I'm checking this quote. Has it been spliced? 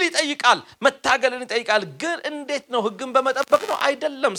no; 0 cuts

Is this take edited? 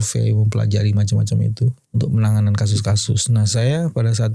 yes; 1 cut; at 1.8 s

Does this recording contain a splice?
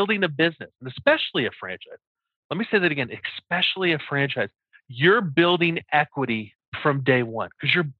no; 0 cuts

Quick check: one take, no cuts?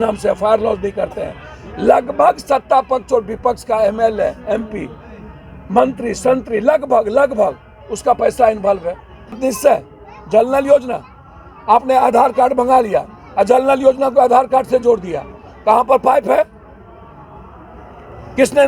no; 1 cut; at 9.4 s

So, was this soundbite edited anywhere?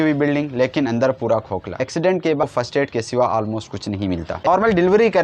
yes; 2 cuts; at 2.4 s, 4.5 s

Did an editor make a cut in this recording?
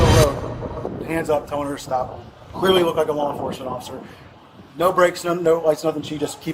no; 0 cuts

